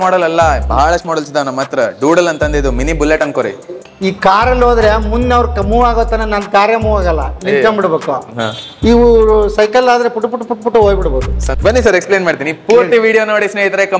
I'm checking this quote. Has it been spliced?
yes; 2 cuts; at 3.8 s, 11.5 s

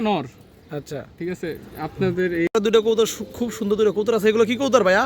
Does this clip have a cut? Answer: yes; 1 cut; at 2.5 s

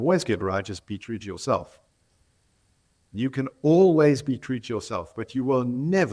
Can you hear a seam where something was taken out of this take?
yes; 1 cut; at 3.1 s

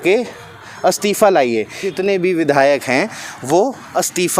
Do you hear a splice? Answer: yes; 1 cut; at 1.8 s

